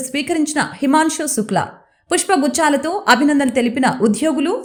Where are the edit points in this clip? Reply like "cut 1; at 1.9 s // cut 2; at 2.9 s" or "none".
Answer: none